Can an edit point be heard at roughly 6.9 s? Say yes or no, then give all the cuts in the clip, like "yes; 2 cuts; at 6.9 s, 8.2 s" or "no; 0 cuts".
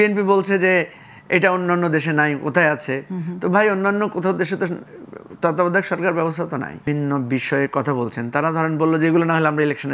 yes; 1 cut; at 6.9 s